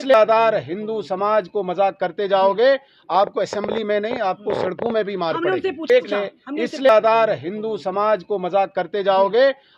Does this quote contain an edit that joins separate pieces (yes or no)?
yes